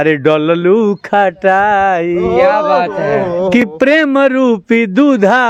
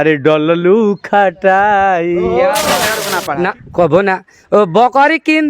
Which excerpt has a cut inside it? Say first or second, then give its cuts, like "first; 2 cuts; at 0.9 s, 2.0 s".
second; 1 cut; at 3.0 s